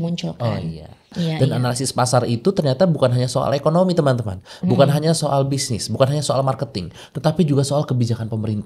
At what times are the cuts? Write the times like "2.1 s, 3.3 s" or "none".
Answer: 1.1 s